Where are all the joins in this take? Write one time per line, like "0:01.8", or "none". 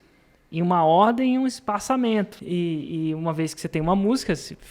0:02.4